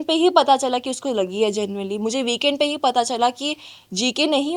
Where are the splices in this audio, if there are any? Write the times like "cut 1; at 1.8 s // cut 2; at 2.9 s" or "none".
none